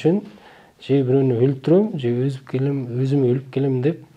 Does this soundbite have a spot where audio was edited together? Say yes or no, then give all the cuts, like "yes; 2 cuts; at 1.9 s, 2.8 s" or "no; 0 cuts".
no; 0 cuts